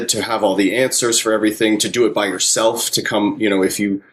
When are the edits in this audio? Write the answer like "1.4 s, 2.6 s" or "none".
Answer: none